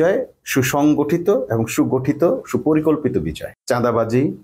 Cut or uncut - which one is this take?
cut